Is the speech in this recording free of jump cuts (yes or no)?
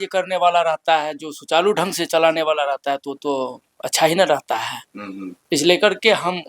yes